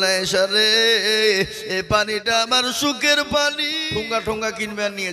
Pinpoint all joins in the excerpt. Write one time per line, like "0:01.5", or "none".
0:03.7